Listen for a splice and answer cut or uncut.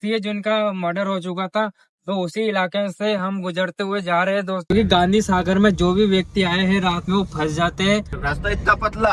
cut